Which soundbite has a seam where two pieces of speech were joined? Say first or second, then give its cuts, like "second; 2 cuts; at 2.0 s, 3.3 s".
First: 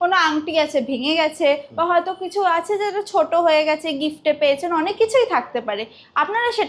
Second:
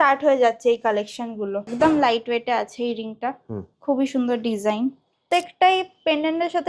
second; 2 cuts; at 1.7 s, 5.2 s